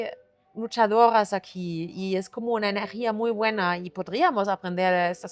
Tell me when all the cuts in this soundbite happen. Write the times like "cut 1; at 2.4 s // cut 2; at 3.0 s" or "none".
none